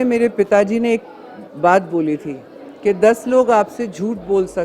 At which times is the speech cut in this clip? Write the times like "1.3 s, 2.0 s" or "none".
none